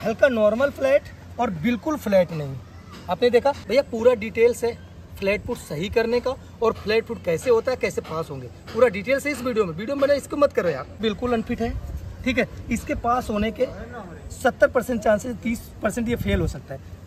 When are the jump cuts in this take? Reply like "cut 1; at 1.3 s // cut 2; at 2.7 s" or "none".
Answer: cut 1; at 3.6 s // cut 2; at 11.0 s